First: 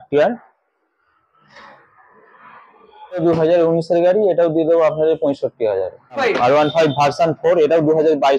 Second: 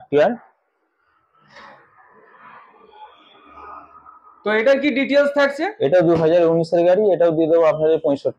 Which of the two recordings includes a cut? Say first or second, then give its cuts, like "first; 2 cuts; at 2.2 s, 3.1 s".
first; 2 cuts; at 3.2 s, 6.2 s